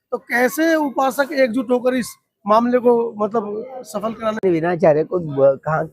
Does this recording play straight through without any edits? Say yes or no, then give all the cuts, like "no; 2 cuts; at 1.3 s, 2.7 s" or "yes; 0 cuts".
no; 1 cut; at 4.4 s